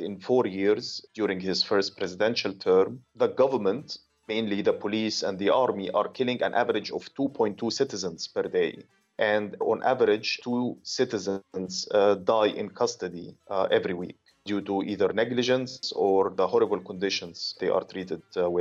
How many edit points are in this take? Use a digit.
1